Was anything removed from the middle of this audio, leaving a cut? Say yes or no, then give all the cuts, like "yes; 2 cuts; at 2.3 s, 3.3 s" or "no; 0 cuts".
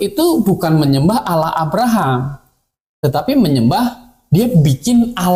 no; 0 cuts